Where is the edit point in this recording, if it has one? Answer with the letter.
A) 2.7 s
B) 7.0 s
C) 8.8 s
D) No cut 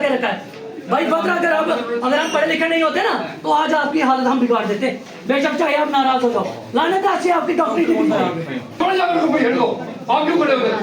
C